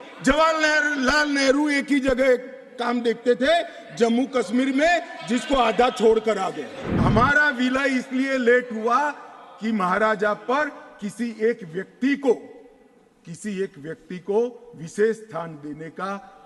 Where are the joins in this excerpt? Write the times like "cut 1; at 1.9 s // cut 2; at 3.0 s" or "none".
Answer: cut 1; at 6.8 s